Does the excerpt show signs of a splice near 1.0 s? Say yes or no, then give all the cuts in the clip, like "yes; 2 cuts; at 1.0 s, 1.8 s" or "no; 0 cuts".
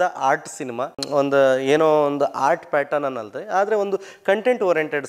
yes; 1 cut; at 1.0 s